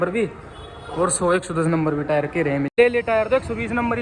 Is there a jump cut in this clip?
yes; 1 cut; at 2.7 s

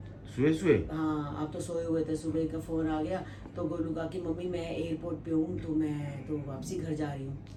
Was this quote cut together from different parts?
no; 0 cuts

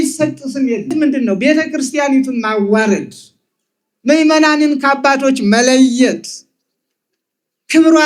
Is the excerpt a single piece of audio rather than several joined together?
no; 1 cut; at 0.9 s

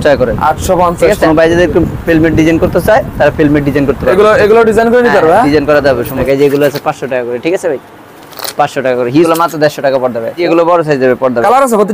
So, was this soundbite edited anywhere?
yes; 4 cuts; at 1.2 s, 6.2 s, 9.3 s, 10.4 s

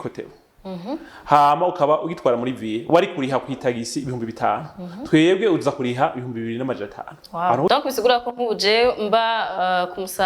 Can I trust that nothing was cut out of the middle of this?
no; 1 cut; at 7.7 s

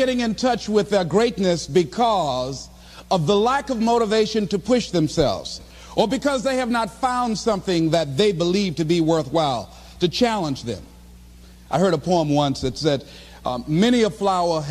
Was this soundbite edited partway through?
yes; 1 cut; at 6.4 s

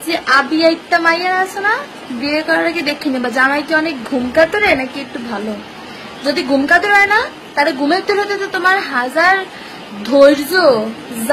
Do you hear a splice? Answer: no; 0 cuts

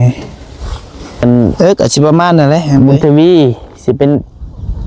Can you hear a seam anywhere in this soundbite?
yes; 1 cut; at 2.8 s

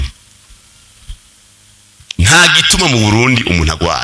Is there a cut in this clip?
no; 0 cuts

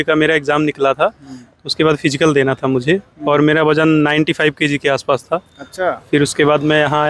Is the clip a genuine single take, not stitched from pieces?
yes; 0 cuts

